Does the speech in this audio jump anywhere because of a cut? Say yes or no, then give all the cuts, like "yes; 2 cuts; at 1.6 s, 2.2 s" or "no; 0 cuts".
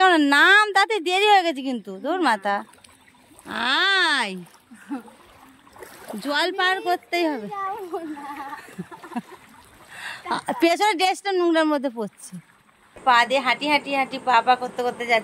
yes; 1 cut; at 13.0 s